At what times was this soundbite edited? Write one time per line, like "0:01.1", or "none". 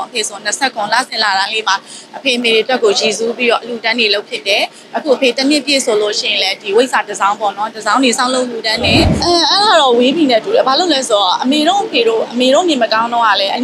0:09.2